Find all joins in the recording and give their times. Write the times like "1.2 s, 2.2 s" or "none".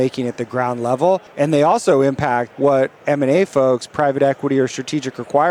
1.3 s, 2.5 s